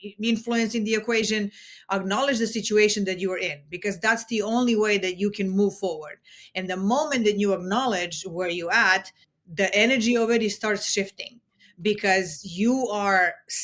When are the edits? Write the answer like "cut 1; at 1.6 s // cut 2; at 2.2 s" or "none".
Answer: none